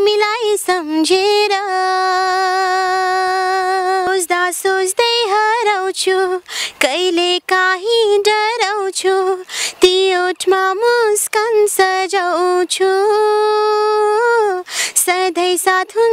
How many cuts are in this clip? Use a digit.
1